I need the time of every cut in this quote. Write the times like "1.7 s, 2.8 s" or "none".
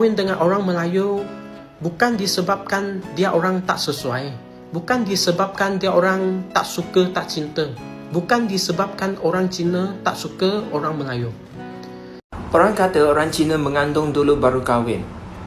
12.2 s